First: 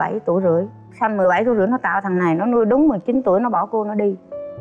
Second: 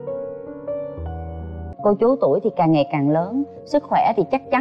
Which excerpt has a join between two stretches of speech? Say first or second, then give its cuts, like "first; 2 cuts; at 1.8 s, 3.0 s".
second; 1 cut; at 1.6 s